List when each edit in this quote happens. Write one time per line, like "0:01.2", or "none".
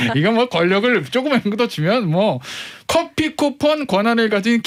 none